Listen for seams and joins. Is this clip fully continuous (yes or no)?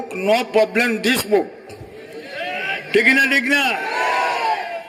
yes